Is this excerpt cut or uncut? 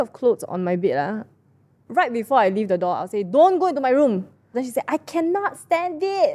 cut